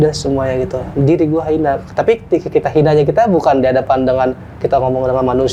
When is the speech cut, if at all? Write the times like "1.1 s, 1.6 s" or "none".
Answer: none

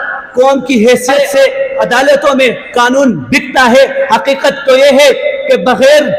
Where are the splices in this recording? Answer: 1.8 s

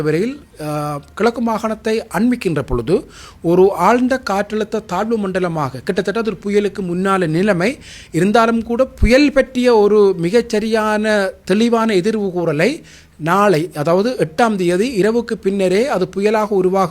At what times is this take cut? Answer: none

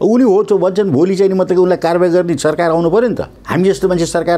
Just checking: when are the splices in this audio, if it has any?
3.3 s

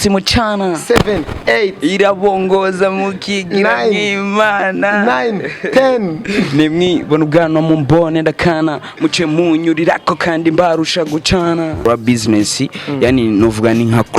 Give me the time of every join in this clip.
11.9 s

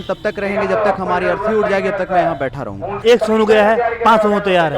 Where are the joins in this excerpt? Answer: 3.0 s

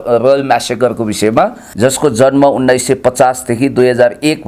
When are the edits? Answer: 1.6 s

